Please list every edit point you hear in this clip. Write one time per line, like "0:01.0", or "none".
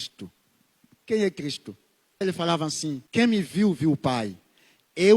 0:02.2
0:03.0